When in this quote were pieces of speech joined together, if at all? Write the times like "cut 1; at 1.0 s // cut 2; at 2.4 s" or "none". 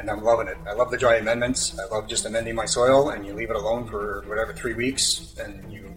none

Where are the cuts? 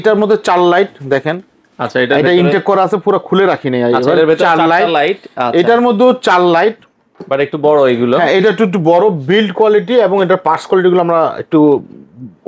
none

